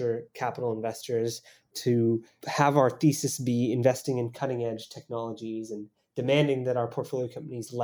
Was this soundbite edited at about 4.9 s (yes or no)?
no